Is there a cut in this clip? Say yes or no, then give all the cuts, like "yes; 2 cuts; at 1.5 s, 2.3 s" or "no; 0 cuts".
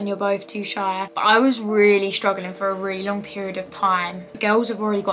yes; 2 cuts; at 1.1 s, 4.3 s